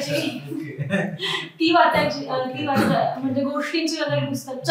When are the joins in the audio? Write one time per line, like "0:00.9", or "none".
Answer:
none